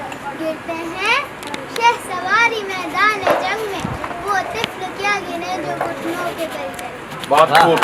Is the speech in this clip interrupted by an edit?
no; 0 cuts

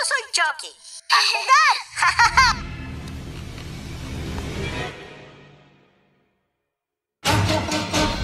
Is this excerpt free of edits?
no; 1 cut; at 2.6 s

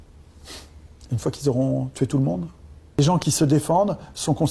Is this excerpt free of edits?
no; 1 cut; at 3.0 s

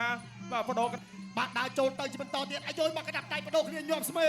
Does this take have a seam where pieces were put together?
yes; 1 cut; at 0.9 s

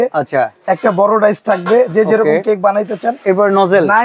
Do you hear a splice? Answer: no; 0 cuts

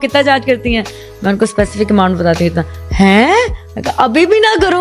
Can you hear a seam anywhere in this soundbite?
no; 0 cuts

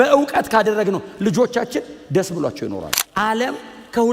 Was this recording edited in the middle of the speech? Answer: yes; 1 cut; at 3.0 s

